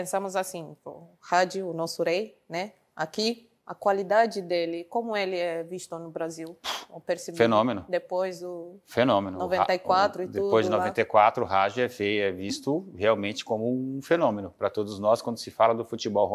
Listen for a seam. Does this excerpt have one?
no; 0 cuts

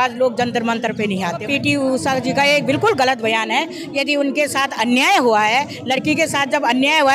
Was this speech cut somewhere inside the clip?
yes; 1 cut; at 1.4 s

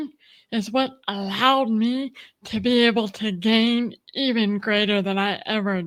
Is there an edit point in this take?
no; 0 cuts

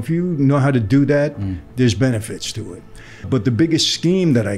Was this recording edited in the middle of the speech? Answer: yes; 1 cut; at 3.2 s

